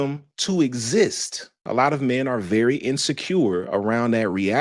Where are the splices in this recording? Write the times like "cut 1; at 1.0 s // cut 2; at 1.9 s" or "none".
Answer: cut 1; at 1.6 s